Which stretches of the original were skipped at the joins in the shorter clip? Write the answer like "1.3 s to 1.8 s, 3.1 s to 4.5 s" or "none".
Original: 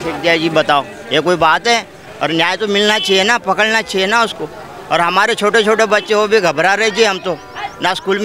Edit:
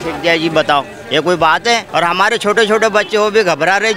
1.9 s to 4.8 s